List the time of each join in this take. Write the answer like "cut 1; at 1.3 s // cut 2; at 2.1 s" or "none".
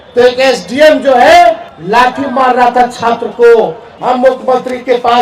cut 1; at 1.7 s // cut 2; at 3.9 s

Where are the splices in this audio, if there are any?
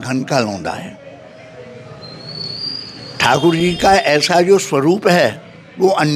none

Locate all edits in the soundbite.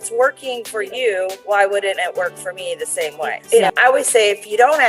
cut 1; at 3.4 s

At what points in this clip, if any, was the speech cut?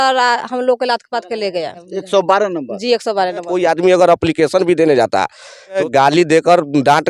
cut 1; at 1.9 s // cut 2; at 3.5 s // cut 3; at 5.8 s

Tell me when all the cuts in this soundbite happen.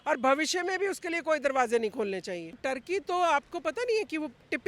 cut 1; at 2.6 s

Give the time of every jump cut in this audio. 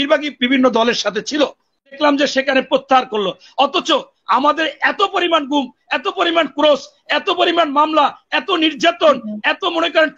cut 1; at 2.0 s

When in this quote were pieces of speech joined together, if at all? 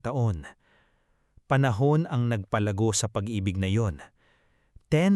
none

